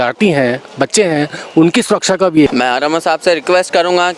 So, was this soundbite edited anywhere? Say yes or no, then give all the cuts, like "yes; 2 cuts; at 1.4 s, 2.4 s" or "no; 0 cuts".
yes; 1 cut; at 2.5 s